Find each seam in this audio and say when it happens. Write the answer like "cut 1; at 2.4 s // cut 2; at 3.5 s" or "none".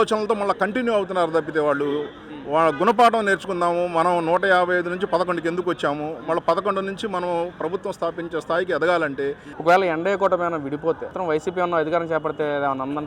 cut 1; at 9.5 s // cut 2; at 11.2 s